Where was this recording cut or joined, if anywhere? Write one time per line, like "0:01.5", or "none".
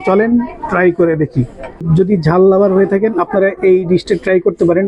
0:01.8